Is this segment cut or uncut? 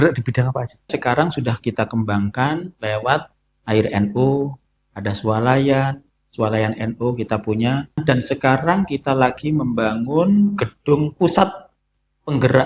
cut